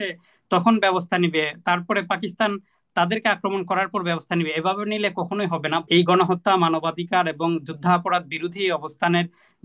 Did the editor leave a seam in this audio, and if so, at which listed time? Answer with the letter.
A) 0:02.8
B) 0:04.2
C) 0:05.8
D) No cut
C